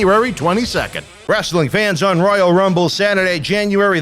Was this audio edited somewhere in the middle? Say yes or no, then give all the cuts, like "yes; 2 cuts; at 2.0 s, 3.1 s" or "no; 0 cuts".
yes; 1 cut; at 1.1 s